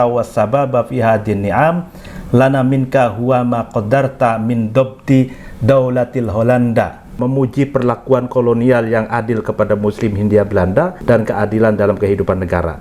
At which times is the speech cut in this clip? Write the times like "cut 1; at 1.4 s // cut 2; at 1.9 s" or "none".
cut 1; at 7.1 s // cut 2; at 11.0 s